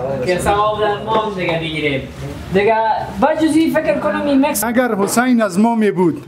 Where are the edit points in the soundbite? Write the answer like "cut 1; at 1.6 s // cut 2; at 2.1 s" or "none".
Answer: cut 1; at 4.6 s